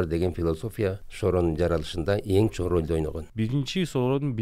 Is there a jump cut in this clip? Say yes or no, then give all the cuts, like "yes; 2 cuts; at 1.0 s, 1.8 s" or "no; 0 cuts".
yes; 2 cuts; at 1.1 s, 3.2 s